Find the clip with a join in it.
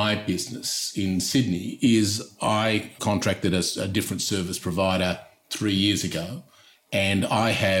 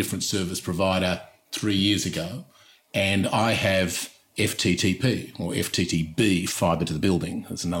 first; 1 cut; at 2.9 s

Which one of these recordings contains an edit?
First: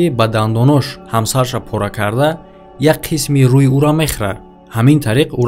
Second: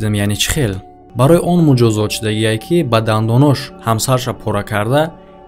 second; 1 cut; at 1.0 s

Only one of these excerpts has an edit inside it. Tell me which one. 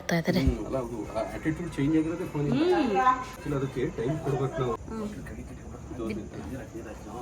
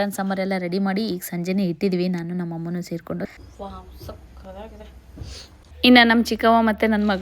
second; 2 cuts; at 3.3 s, 5.6 s

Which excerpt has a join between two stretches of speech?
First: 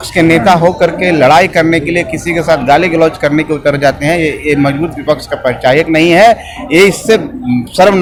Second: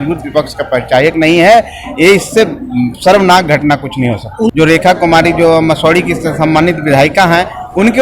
second; 1 cut; at 4.5 s

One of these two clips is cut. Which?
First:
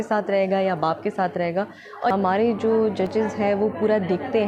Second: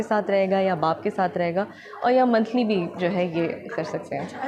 first; 1 cut; at 2.1 s

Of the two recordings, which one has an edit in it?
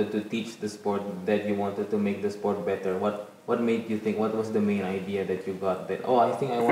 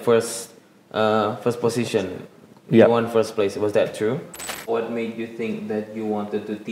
second; 1 cut; at 4.7 s

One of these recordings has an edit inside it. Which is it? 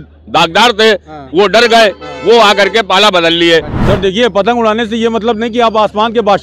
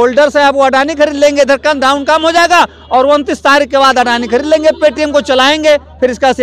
first; 1 cut; at 3.7 s

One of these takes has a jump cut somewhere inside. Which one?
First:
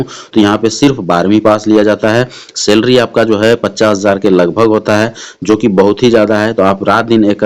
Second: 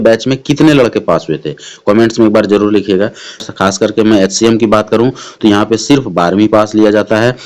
second; 1 cut; at 3.4 s

